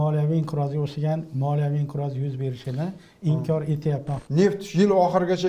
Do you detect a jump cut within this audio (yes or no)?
yes